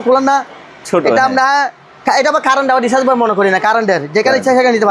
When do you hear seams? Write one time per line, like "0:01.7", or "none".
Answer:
none